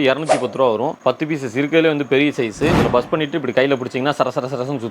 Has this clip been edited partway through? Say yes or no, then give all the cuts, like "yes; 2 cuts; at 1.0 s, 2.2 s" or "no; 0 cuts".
yes; 1 cut; at 2.8 s